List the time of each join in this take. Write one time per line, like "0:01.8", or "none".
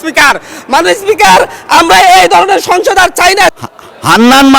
0:03.5